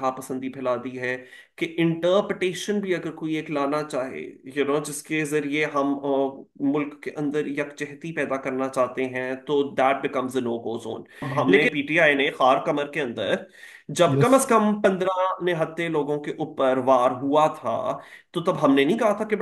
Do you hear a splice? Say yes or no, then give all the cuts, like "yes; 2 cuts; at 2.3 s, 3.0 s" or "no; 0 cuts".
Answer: yes; 1 cut; at 11.4 s